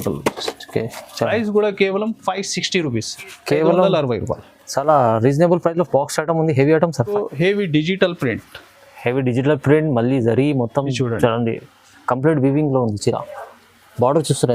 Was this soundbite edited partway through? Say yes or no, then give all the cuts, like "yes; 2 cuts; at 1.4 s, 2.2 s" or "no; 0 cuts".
yes; 1 cut; at 7.1 s